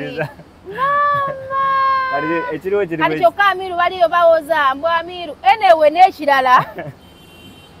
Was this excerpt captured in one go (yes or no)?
yes